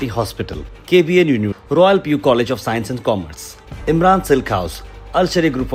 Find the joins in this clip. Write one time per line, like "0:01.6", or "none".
none